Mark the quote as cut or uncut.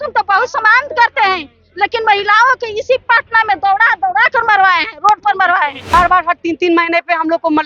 cut